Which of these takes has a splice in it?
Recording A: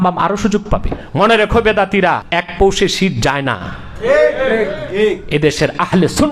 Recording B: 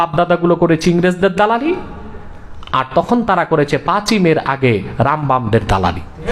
A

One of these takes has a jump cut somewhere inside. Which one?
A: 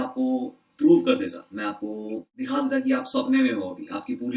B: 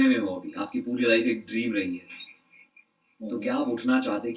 A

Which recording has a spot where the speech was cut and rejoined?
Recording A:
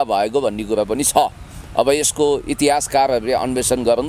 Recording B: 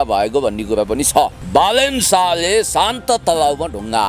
B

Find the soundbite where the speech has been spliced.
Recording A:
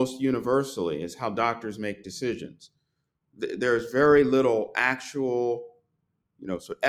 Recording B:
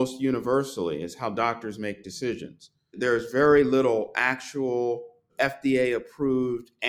B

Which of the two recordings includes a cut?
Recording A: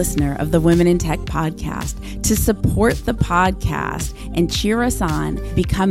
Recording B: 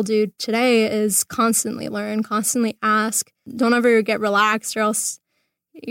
B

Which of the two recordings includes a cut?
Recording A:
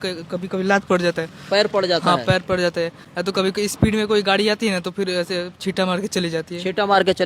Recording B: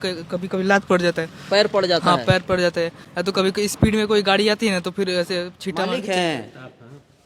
B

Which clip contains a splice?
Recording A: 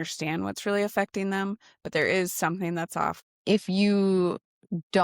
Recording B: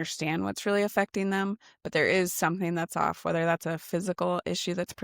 A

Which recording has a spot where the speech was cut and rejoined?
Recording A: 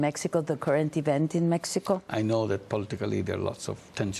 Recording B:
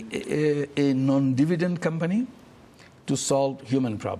A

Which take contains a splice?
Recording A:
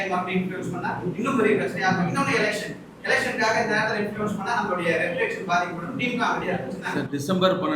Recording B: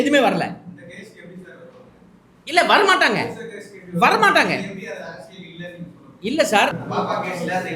B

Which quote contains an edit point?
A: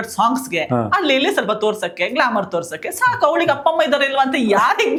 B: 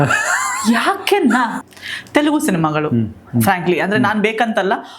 B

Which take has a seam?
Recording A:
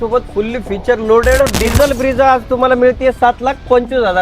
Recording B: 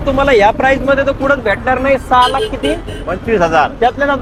A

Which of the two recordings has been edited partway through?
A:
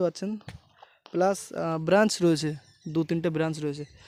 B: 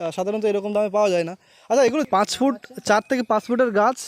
B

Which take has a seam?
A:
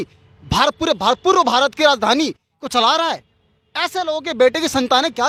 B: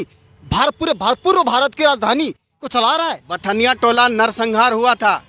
B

